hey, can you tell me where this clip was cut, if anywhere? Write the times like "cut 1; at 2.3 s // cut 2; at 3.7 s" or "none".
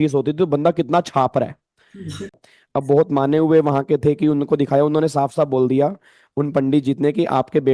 cut 1; at 2.4 s